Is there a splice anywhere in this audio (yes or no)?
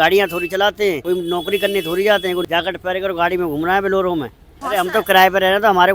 yes